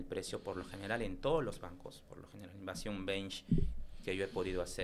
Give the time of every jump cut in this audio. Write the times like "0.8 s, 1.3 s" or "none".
none